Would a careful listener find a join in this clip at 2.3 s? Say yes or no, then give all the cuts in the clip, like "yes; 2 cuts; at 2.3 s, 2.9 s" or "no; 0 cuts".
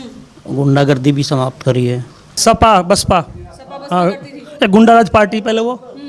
yes; 1 cut; at 2.3 s